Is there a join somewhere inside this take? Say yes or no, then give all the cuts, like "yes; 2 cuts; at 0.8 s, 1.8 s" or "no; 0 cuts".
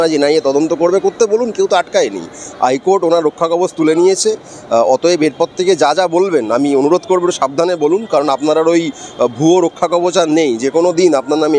no; 0 cuts